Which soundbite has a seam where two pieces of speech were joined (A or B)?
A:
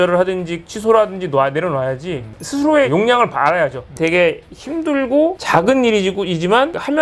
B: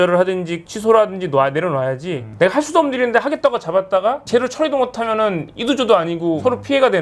A